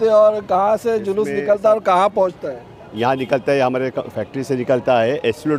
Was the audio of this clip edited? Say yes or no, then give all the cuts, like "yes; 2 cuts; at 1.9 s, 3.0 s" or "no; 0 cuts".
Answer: no; 0 cuts